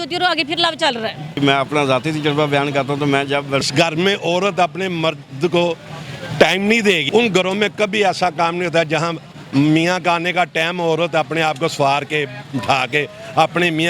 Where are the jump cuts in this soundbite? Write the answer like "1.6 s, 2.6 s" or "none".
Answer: 1.4 s, 3.6 s, 7.0 s